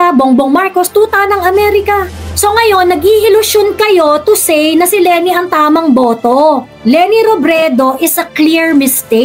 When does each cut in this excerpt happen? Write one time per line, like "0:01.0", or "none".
0:02.2

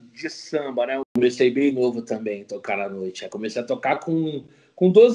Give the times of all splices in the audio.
0:01.1

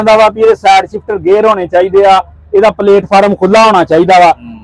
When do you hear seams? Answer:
none

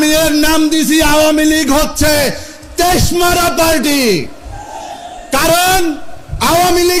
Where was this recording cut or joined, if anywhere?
none

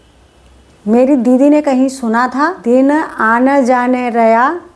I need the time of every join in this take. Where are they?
0:02.6

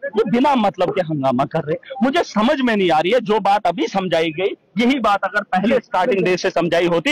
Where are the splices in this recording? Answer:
none

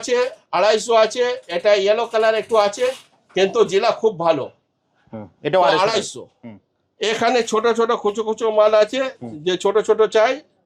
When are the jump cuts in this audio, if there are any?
none

